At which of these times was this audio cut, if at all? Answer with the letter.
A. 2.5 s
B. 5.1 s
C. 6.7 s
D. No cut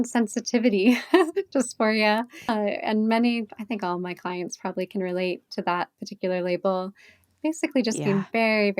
A